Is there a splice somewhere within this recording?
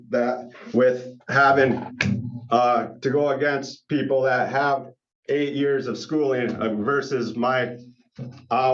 no; 0 cuts

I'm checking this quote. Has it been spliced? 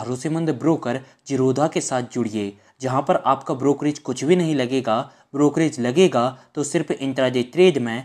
no; 0 cuts

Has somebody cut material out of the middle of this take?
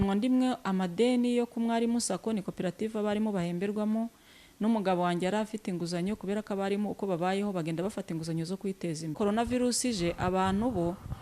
yes; 1 cut; at 9.1 s

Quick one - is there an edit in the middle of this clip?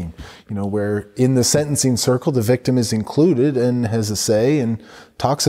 no; 0 cuts

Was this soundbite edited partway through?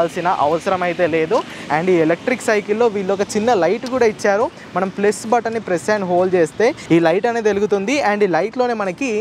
no; 0 cuts

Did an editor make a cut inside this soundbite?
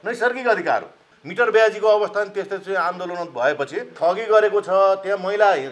yes; 2 cuts; at 1.0 s, 3.9 s

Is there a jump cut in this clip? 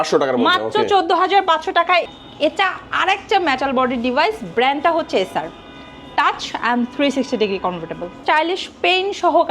yes; 2 cuts; at 2.1 s, 8.2 s

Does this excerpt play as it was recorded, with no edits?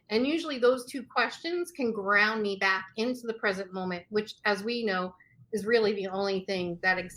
yes; 0 cuts

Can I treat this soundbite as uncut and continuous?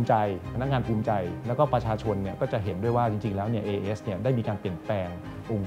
yes; 0 cuts

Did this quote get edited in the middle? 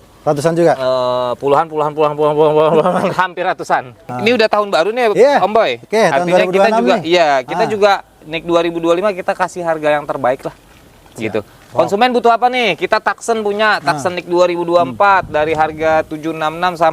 yes; 1 cut; at 4.1 s

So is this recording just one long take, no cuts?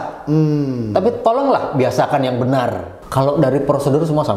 no; 1 cut; at 2.9 s

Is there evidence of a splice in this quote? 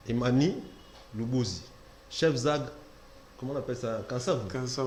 no; 0 cuts

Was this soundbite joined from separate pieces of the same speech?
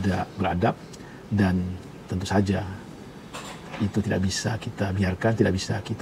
no; 0 cuts

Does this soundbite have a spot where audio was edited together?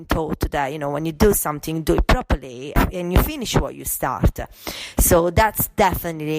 yes; 1 cut; at 2.8 s

